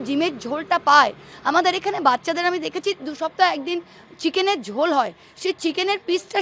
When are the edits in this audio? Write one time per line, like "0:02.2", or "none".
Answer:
none